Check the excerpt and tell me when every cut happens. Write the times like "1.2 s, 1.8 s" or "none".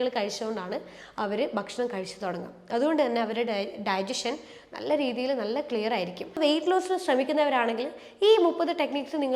6.4 s